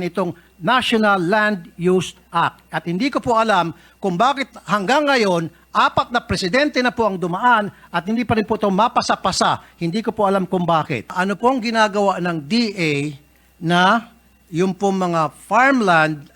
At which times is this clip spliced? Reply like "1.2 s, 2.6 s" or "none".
11.2 s